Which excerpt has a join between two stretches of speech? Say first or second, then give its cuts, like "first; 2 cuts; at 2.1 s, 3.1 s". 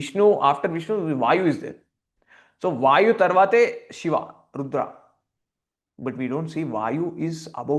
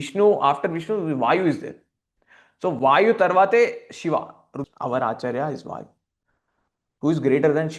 second; 1 cut; at 4.7 s